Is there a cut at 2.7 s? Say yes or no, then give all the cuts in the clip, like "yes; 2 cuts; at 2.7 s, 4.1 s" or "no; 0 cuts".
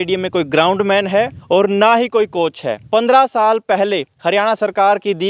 yes; 2 cuts; at 1.4 s, 2.7 s